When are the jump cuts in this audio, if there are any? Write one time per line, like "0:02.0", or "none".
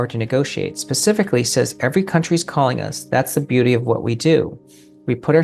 none